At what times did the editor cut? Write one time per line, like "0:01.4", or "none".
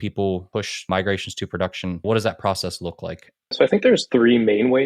0:00.9
0:02.0
0:03.7